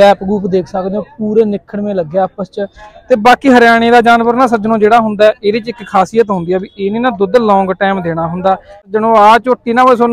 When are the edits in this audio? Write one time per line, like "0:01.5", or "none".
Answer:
0:08.9